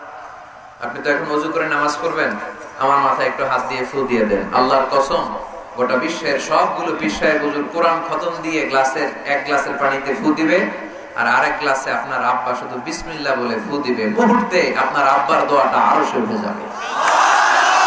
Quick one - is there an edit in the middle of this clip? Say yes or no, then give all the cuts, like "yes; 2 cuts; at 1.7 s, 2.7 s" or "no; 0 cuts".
no; 0 cuts